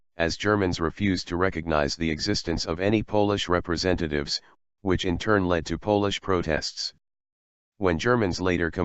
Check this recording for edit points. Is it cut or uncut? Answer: cut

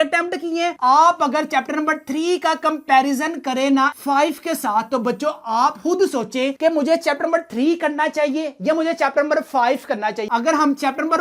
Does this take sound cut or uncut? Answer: cut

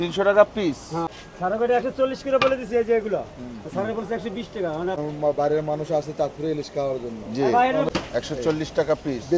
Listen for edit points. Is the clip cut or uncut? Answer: cut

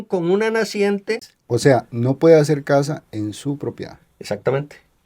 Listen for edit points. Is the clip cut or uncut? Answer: cut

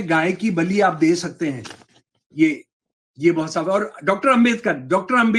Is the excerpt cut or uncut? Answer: uncut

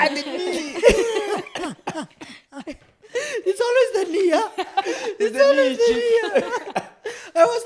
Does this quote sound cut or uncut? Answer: uncut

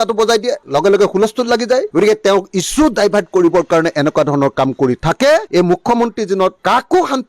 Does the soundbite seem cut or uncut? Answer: uncut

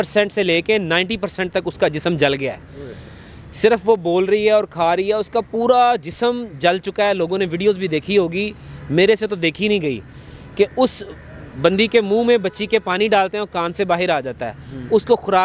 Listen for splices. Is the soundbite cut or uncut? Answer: uncut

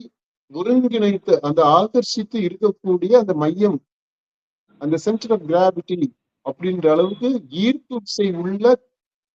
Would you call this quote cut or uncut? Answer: uncut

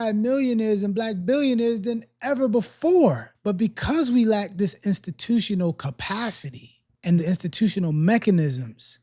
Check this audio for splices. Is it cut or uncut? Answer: cut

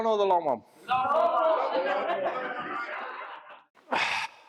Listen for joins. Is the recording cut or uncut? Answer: cut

